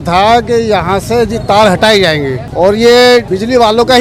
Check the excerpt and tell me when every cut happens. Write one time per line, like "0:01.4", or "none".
none